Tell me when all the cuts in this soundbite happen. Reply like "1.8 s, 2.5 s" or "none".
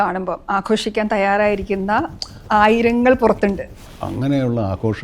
3.7 s